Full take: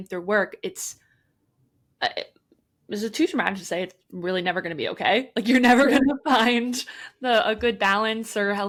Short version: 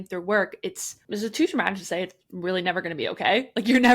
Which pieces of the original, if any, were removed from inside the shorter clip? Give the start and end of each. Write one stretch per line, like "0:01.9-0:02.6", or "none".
0:00.9-0:02.7